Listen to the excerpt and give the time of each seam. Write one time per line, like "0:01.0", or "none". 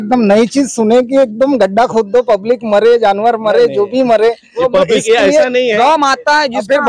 0:05.8